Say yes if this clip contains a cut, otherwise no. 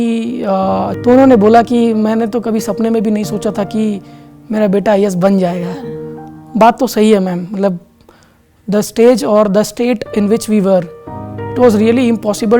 yes